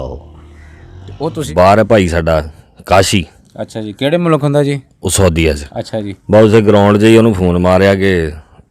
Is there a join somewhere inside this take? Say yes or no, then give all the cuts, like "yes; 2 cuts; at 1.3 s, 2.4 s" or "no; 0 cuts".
yes; 1 cut; at 1.4 s